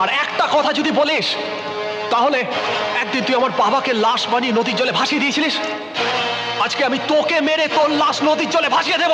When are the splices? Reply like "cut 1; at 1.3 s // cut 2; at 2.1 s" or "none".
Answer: none

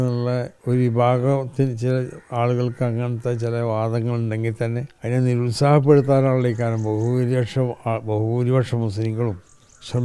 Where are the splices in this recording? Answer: cut 1; at 4.9 s

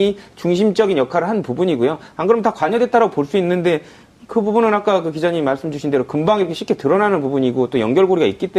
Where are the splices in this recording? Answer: cut 1; at 2.5 s

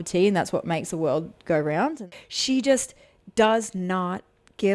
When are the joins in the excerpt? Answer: cut 1; at 2.0 s

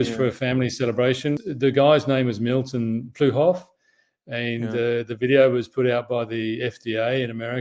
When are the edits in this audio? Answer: cut 1; at 1.4 s

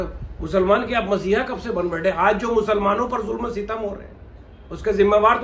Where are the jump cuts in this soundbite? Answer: none

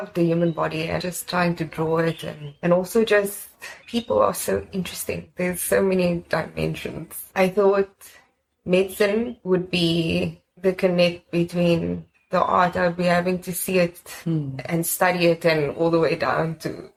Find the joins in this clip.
none

